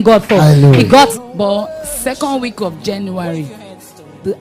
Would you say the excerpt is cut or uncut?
cut